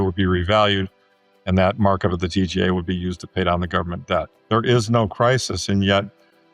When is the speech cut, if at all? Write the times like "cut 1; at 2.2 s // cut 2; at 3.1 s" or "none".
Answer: cut 1; at 4.4 s

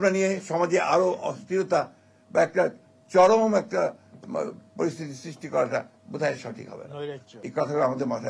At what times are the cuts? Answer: cut 1; at 7.3 s

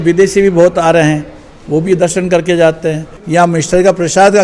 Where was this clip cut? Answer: cut 1; at 3.1 s

